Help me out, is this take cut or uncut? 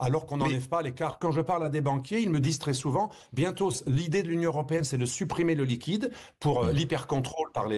uncut